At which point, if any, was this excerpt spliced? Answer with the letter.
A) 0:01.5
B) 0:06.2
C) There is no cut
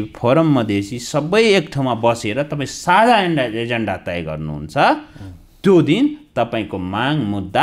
C